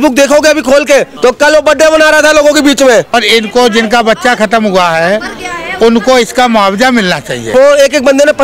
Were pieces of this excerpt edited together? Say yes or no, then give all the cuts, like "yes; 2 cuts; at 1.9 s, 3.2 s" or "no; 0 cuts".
yes; 3 cuts; at 1.1 s, 3.1 s, 7.4 s